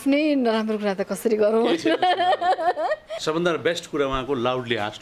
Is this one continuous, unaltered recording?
no; 1 cut; at 3.2 s

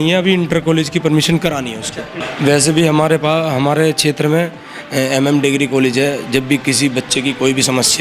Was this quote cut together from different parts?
no; 0 cuts

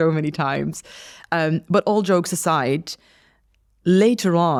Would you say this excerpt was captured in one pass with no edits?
yes; 0 cuts

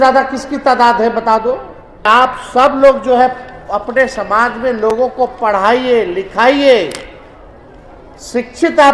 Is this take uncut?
no; 1 cut; at 2.1 s

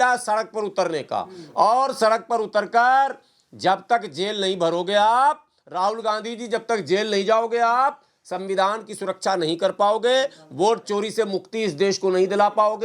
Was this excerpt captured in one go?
yes; 0 cuts

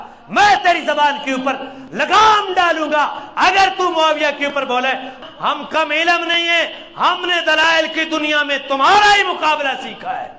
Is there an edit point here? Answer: yes; 1 cut; at 5.2 s

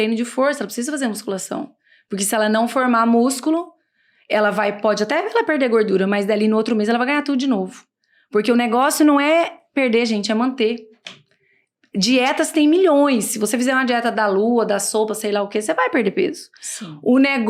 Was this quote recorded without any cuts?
yes; 0 cuts

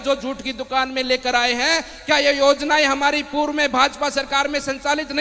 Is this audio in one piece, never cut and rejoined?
yes; 0 cuts

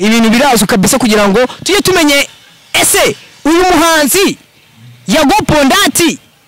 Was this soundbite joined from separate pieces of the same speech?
no; 0 cuts

